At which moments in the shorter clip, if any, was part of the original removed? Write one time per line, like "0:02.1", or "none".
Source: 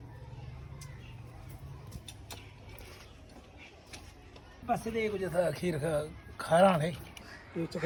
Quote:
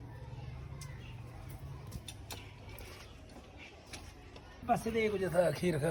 none